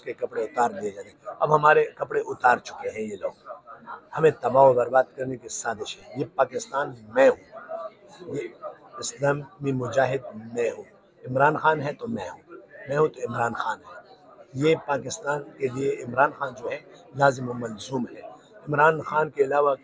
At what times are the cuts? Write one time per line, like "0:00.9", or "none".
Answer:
none

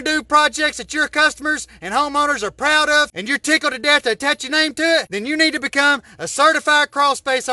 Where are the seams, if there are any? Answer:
0:03.2
0:05.1

